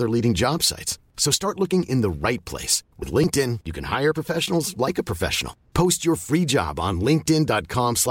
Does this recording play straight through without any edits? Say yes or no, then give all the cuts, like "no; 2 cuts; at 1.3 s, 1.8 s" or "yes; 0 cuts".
yes; 0 cuts